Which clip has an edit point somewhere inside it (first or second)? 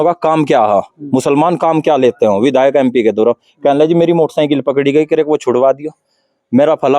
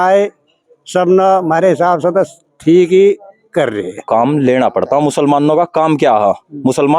second